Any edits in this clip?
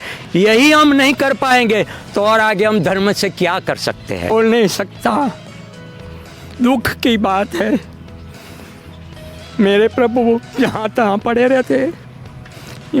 yes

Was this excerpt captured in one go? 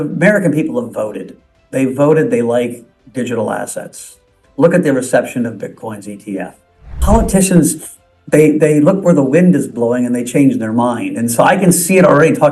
no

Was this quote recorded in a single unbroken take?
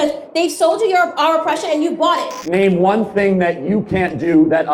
no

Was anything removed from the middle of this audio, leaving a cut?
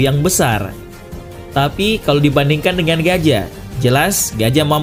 no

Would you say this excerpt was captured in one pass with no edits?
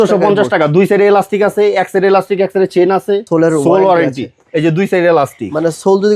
no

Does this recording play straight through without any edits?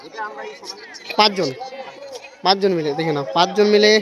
yes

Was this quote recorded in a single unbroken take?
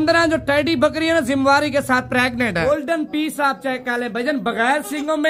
no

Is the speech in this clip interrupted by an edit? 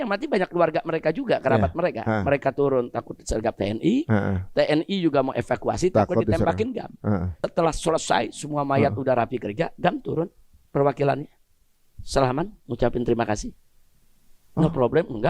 yes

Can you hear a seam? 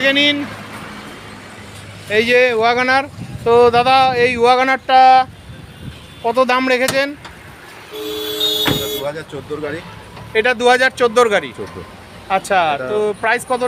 no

